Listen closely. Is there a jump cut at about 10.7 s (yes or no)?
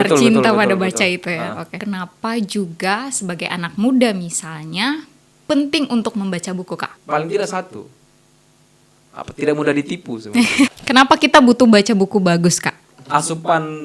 yes